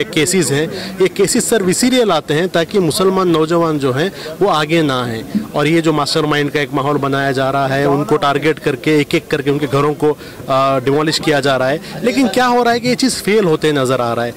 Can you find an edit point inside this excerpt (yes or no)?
no